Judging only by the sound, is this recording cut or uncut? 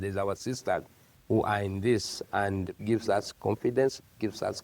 cut